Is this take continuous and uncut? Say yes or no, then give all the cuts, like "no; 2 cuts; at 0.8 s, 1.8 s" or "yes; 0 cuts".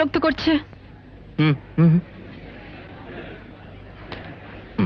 yes; 0 cuts